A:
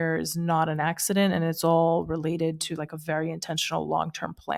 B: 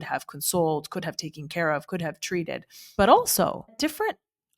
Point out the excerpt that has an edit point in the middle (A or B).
B